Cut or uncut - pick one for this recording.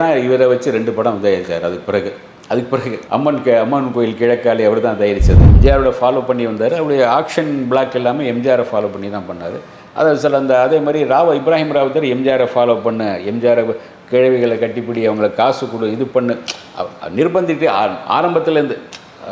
cut